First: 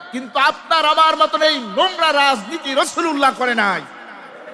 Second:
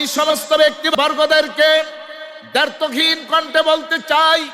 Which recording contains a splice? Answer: second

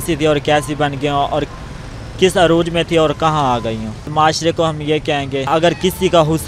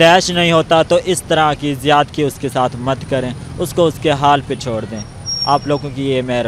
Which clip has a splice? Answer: first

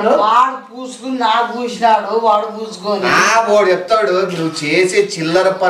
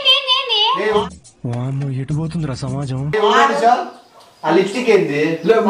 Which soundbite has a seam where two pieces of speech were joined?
second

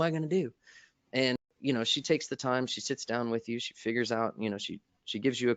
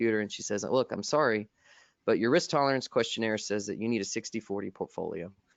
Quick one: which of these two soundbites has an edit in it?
first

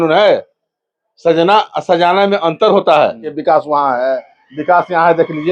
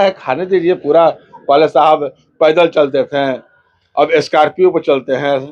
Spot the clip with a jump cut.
first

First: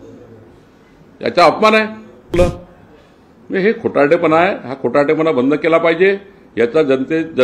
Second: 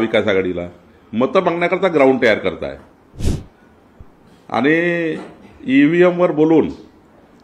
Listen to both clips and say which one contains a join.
first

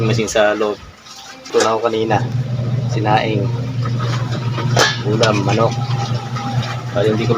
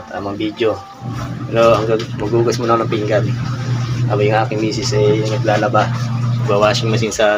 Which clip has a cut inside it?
first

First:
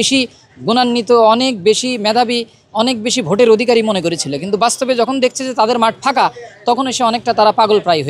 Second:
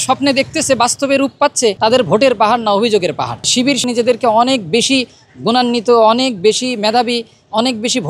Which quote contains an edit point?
second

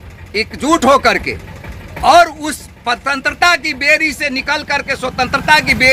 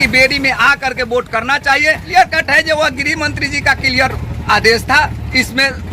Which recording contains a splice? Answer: second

